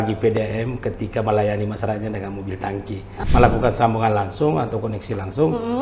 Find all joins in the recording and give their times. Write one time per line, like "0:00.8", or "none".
0:03.1